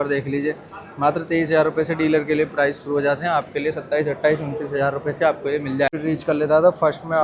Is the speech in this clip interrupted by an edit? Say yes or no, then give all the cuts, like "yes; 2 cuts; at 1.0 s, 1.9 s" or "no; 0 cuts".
yes; 1 cut; at 5.9 s